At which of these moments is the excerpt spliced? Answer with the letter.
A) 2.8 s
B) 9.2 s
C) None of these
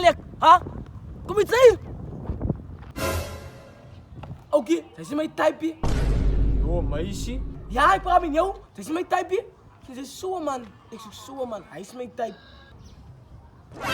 A